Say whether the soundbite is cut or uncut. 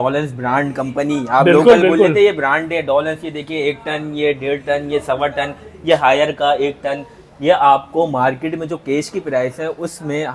uncut